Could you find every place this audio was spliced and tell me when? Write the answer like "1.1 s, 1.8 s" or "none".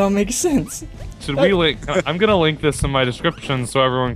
1.5 s